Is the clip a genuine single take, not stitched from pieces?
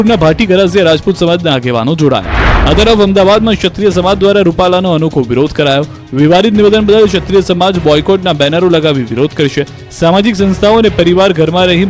no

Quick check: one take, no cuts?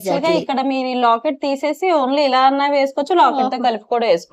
yes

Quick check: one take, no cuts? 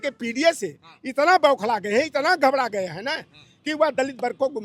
yes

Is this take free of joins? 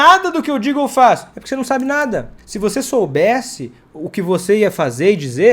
no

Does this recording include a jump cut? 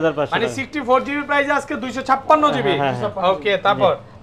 no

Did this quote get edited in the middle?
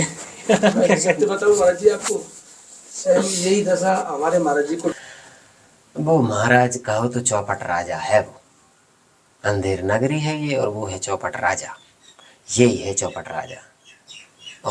yes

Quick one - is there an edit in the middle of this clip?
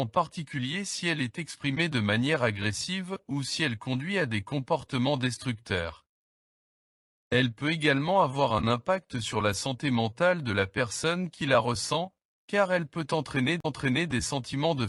no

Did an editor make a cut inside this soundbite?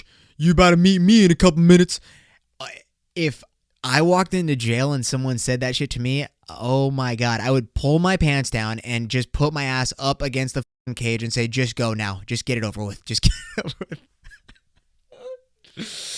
no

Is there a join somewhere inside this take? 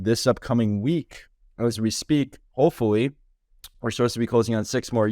no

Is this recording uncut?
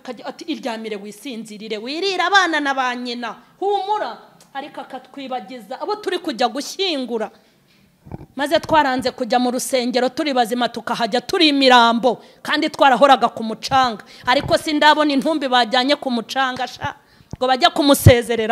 yes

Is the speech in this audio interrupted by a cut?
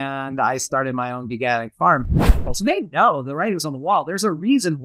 yes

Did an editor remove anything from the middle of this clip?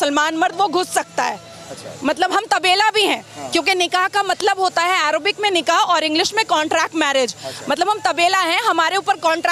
no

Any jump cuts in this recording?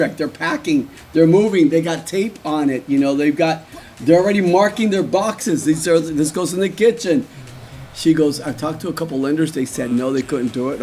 yes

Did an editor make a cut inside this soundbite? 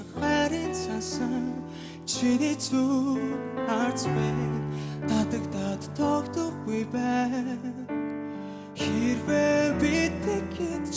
no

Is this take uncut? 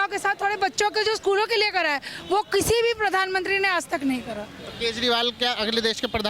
yes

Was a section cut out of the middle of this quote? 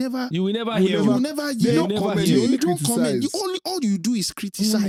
no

